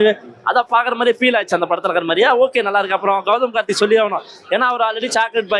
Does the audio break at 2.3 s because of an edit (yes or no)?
no